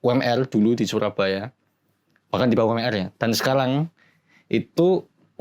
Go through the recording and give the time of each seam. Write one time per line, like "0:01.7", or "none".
none